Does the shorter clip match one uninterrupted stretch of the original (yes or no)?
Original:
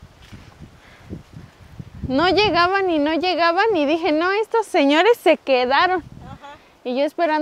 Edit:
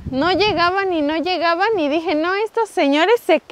yes